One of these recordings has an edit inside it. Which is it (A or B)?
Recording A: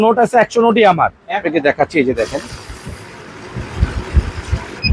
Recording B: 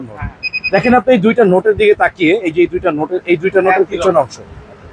A